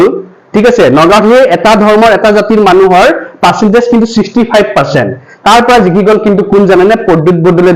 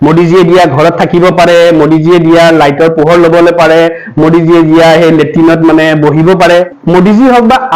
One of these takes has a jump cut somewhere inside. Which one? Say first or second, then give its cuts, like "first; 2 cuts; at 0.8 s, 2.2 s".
second; 1 cut; at 6.8 s